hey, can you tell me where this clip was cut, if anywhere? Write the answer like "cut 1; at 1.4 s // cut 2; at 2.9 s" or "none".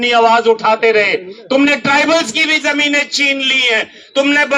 none